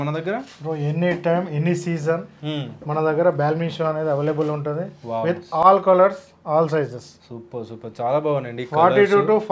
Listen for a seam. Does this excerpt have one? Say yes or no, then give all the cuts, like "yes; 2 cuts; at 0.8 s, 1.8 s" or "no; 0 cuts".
no; 0 cuts